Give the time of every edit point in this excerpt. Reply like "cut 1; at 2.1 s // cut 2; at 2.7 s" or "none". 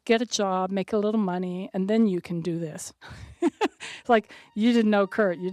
cut 1; at 3.0 s